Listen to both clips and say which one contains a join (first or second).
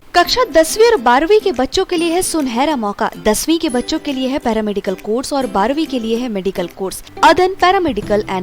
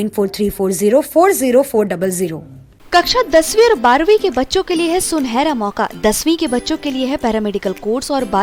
first